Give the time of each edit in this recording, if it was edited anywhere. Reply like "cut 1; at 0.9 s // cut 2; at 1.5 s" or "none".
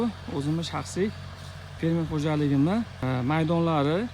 cut 1; at 3.0 s